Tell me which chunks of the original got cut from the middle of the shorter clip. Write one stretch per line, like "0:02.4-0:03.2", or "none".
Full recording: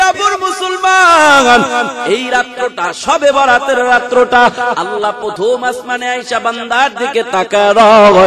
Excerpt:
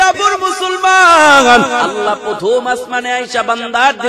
0:01.9-0:04.9